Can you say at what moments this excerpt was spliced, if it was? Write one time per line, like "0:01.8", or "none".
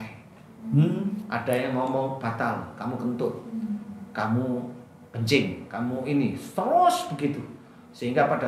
none